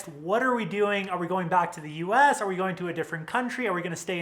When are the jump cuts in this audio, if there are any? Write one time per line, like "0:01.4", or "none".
none